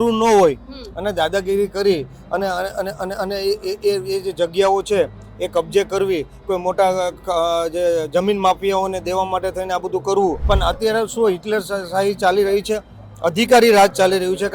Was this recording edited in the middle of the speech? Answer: yes; 1 cut; at 10.4 s

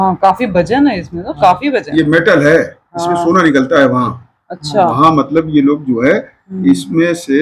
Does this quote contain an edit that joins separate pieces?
no; 0 cuts

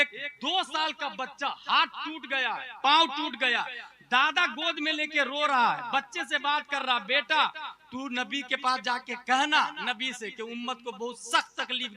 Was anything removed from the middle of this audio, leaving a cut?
no; 0 cuts

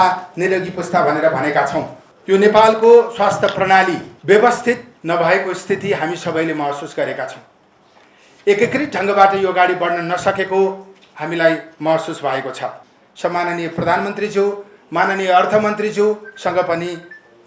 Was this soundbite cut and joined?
yes; 4 cuts; at 2.0 s, 4.1 s, 4.9 s, 12.8 s

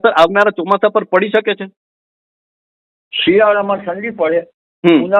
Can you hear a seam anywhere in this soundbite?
no; 0 cuts

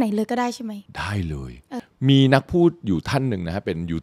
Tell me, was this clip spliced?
yes; 1 cut; at 1.9 s

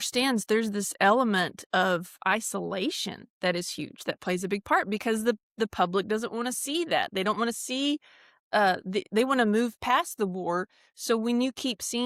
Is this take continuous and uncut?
yes; 0 cuts

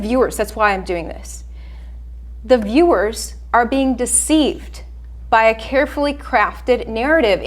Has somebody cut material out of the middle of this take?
no; 0 cuts

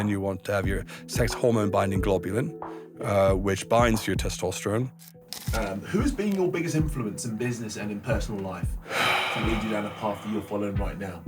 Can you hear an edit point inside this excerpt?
yes; 1 cut; at 5.2 s

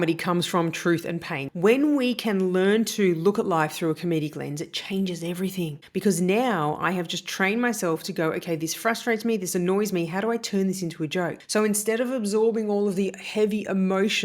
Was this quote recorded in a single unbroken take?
no; 2 cuts; at 1.4 s, 11.4 s

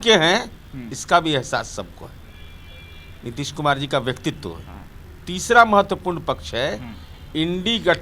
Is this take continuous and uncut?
yes; 0 cuts

